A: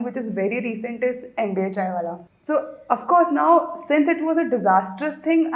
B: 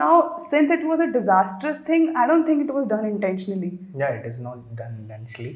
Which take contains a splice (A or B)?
A